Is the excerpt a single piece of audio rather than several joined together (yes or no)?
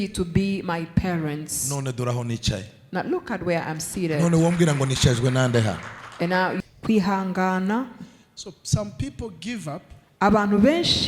no